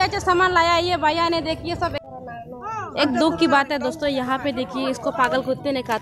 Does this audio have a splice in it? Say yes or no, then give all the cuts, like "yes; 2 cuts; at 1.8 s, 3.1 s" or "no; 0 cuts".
yes; 1 cut; at 2.0 s